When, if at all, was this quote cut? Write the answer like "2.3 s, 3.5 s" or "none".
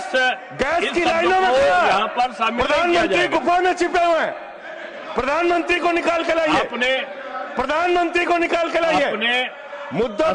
none